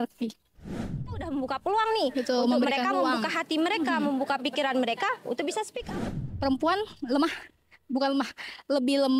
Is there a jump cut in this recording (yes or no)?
yes